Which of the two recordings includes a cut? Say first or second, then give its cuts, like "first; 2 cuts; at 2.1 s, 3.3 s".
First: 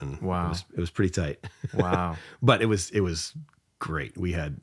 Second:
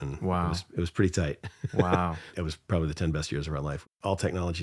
second; 2 cuts; at 2.3 s, 3.8 s